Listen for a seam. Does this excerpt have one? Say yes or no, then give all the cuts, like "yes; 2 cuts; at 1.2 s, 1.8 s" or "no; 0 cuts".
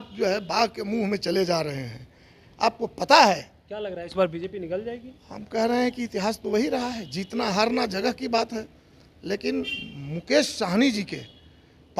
no; 0 cuts